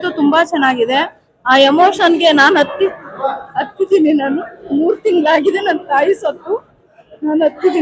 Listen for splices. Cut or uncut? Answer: uncut